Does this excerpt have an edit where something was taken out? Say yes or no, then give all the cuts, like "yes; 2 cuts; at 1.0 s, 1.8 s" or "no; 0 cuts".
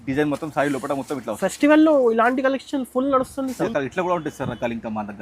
yes; 1 cut; at 3.7 s